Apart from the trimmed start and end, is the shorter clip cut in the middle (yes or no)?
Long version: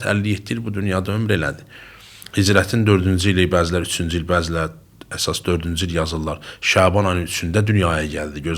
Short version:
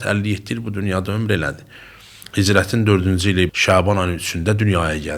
yes